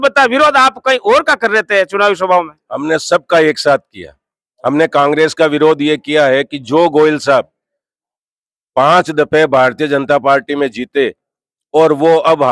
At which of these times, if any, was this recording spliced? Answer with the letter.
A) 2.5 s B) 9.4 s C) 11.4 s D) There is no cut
D